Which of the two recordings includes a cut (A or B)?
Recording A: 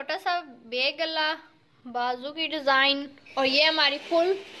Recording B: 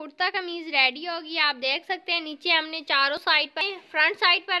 B